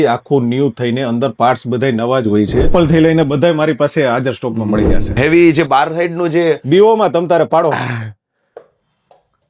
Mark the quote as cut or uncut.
cut